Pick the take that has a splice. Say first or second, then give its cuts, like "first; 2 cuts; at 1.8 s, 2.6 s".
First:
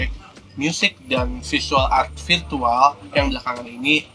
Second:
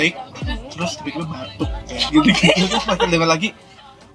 second; 1 cut; at 2.1 s